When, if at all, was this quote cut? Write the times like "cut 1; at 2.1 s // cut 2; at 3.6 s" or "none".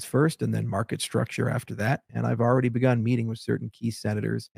cut 1; at 2.1 s